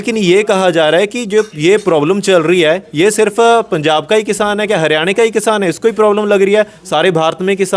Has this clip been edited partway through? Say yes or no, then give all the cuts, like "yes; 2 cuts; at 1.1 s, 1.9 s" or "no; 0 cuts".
no; 0 cuts